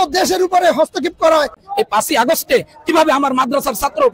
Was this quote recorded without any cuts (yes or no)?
no